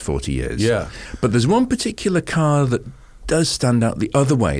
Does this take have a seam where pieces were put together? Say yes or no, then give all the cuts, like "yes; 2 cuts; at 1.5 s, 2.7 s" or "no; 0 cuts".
yes; 1 cut; at 1.0 s